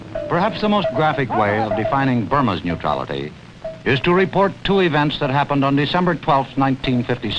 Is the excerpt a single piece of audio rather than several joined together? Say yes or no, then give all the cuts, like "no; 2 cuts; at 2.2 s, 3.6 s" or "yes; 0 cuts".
no; 1 cut; at 5.5 s